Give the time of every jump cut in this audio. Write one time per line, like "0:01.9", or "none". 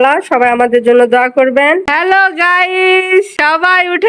0:01.9
0:03.4